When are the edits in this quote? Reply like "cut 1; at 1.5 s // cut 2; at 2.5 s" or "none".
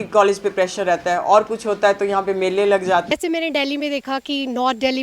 cut 1; at 3.1 s